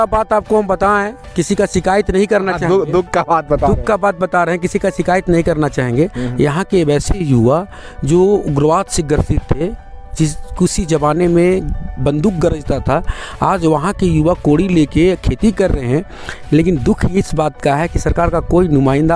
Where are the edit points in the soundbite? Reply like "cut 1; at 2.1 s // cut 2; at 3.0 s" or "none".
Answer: none